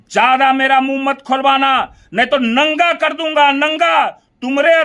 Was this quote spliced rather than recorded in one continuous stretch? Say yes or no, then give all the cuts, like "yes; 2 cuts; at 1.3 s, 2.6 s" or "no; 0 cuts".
no; 0 cuts